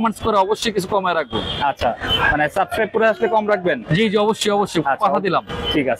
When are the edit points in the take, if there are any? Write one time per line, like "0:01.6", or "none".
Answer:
none

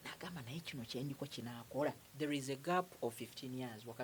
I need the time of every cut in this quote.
0:02.1

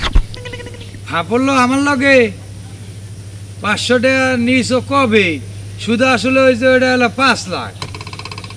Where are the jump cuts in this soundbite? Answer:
none

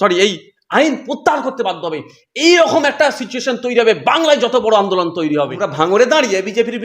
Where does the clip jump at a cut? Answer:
0:05.6

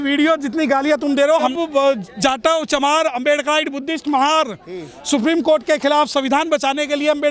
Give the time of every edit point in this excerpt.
0:01.5

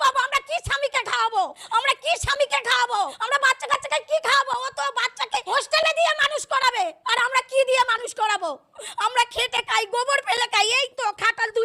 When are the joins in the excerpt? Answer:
0:01.6
0:03.2
0:05.5
0:07.0

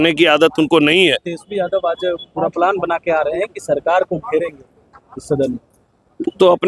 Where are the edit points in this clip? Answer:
0:01.3

